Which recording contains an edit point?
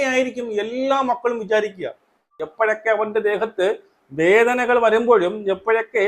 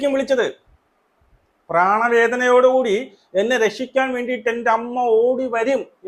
first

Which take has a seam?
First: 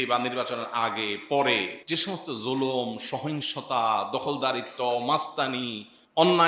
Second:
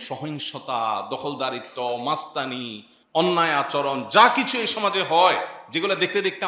first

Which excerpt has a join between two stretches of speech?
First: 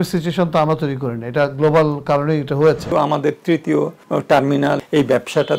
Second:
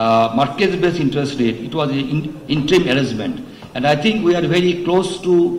first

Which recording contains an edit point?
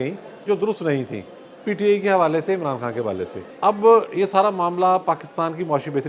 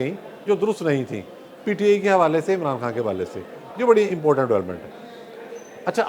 first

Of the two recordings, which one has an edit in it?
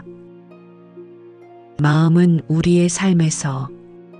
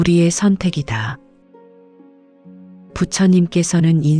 second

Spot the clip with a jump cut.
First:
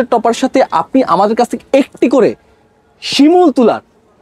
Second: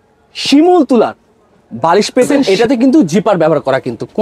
second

